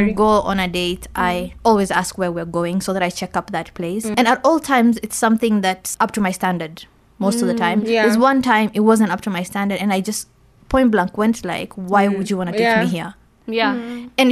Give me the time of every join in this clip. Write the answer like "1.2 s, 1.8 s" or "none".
4.1 s, 5.9 s